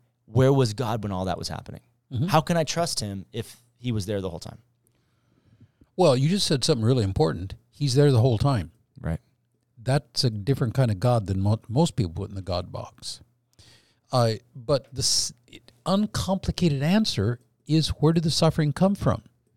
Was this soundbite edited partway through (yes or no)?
no